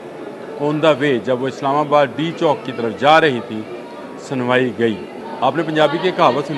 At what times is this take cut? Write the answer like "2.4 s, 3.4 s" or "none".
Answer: 5.2 s